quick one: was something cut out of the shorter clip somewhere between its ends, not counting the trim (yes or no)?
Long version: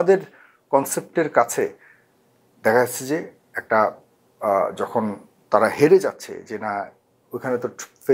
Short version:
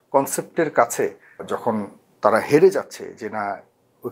yes